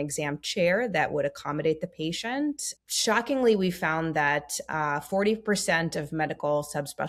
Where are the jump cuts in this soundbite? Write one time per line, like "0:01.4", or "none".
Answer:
0:02.7

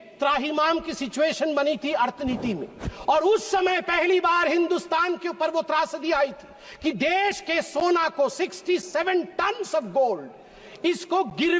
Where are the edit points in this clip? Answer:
none

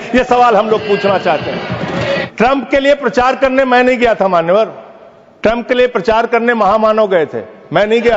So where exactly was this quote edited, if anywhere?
0:02.3

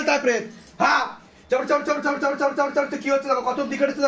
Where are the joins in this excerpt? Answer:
none

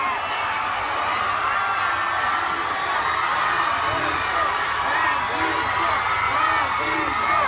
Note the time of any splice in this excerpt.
none

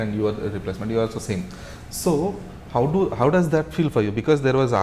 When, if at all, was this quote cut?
none

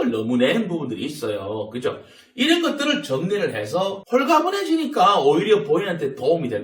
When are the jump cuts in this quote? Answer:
0:04.0

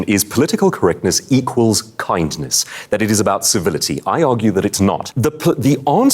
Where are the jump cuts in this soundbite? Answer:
0:05.1

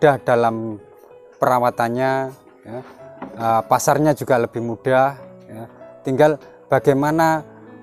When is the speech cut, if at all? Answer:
none

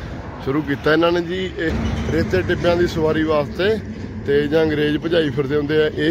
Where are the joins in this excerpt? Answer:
0:01.7

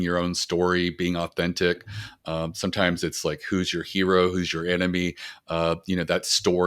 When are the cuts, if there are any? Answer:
none

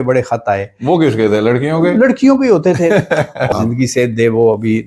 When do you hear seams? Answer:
0:03.5

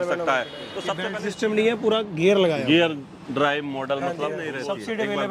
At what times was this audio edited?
0:01.1
0:04.5

